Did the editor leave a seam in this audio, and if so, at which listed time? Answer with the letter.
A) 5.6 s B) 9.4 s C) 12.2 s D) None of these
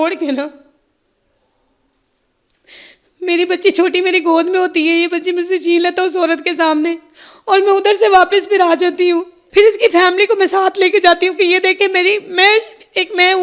B